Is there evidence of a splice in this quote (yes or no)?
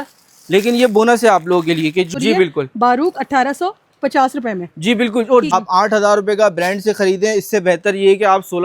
yes